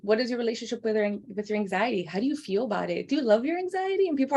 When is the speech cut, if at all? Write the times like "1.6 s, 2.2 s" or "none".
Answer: none